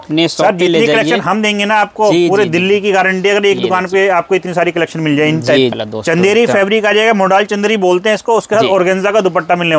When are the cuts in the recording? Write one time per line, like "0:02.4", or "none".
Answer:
0:05.7